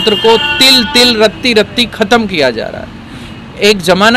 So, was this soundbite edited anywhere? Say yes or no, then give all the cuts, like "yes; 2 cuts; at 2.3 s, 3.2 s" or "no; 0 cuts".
no; 0 cuts